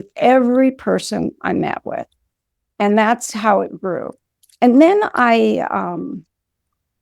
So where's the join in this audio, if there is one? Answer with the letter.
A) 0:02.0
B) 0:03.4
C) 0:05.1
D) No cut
D